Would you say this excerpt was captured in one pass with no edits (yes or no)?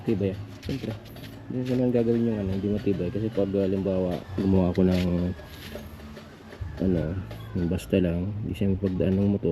yes